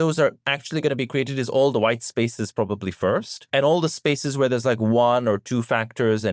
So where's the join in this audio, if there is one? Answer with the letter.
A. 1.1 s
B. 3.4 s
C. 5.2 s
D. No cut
B